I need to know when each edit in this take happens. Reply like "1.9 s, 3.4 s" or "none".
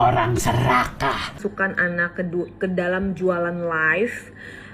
1.4 s